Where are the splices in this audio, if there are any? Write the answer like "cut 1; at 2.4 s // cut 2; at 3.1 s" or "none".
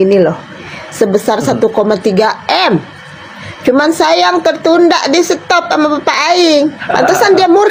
none